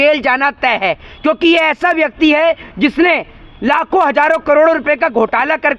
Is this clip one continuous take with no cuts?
yes; 0 cuts

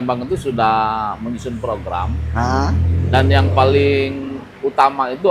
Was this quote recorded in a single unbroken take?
yes; 0 cuts

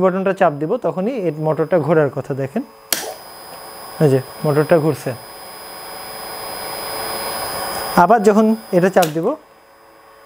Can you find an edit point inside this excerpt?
no; 0 cuts

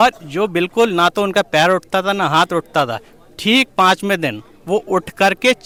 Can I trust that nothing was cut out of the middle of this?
yes; 0 cuts

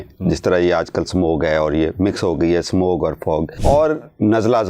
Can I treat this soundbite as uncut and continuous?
no; 1 cut; at 3.5 s

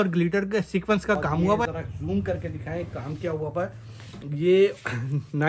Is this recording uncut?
no; 1 cut; at 1.6 s

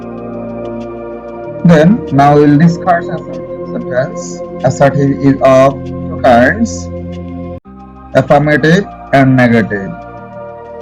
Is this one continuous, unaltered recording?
no; 4 cuts; at 1.6 s, 6.7 s, 8.0 s, 9.9 s

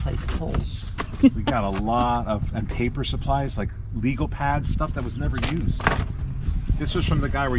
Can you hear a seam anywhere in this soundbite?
no; 0 cuts

